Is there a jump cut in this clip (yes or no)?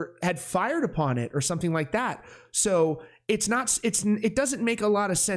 no